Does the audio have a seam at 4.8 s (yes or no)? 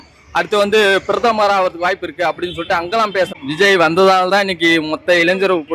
no